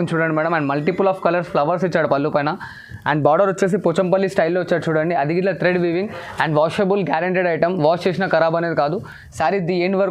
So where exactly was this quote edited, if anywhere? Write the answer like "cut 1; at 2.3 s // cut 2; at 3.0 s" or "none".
none